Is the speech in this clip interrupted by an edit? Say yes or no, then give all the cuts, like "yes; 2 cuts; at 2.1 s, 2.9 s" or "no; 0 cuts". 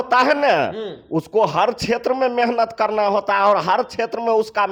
no; 0 cuts